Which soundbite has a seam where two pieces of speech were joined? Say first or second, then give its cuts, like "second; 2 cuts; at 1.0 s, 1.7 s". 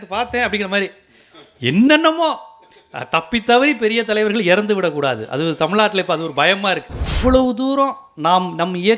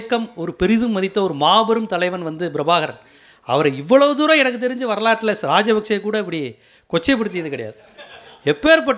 first; 1 cut; at 7.1 s